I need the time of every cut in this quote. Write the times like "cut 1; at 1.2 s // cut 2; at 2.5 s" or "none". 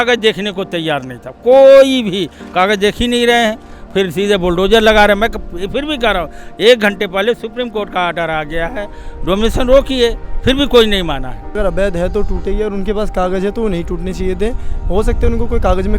cut 1; at 11.6 s